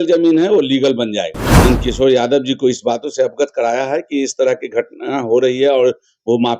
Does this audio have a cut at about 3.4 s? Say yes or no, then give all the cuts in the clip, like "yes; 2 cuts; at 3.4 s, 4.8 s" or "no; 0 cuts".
no; 1 cut; at 1.4 s